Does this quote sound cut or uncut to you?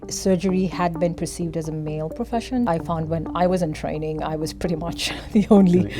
cut